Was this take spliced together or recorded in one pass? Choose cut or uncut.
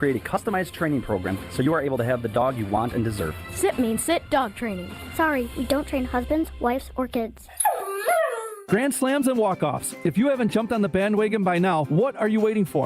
cut